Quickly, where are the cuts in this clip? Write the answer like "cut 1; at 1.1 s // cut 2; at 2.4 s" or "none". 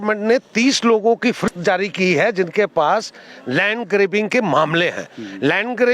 cut 1; at 1.5 s